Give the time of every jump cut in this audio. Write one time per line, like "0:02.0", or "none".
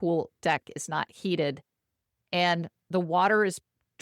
none